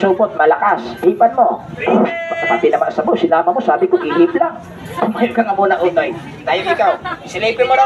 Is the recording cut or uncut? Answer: uncut